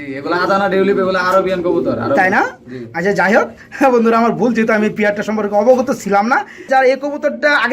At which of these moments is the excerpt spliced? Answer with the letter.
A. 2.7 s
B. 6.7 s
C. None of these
B